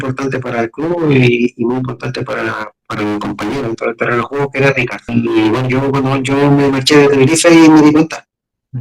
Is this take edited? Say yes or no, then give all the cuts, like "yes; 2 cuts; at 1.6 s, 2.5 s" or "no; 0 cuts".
yes; 1 cut; at 5.1 s